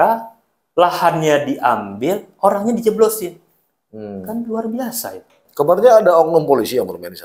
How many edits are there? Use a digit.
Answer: 1